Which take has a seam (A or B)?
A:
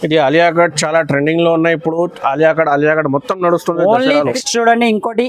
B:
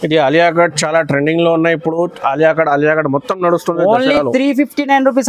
A